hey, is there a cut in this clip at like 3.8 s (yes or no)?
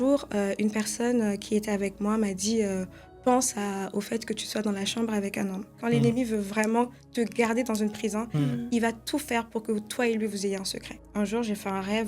no